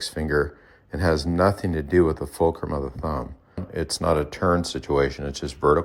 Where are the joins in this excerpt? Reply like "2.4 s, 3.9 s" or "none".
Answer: 3.7 s